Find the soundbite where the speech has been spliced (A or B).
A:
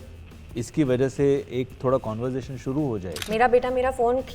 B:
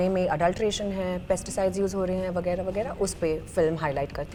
A